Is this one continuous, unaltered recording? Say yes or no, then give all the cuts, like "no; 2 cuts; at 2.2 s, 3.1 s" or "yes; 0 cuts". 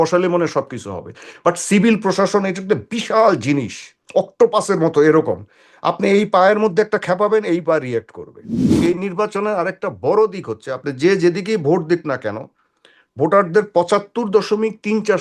no; 1 cut; at 8.6 s